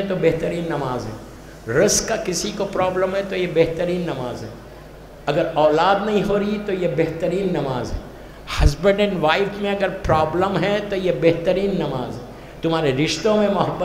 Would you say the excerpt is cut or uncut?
uncut